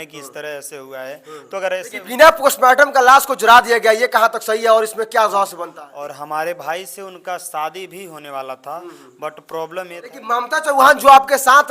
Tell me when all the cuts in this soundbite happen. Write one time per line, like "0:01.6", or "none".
0:02.0
0:05.8
0:10.2